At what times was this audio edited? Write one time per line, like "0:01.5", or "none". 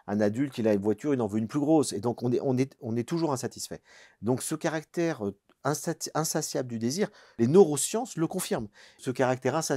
0:07.4
0:08.9